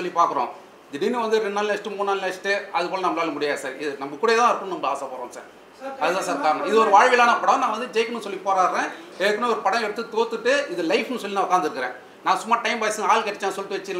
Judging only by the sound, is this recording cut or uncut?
uncut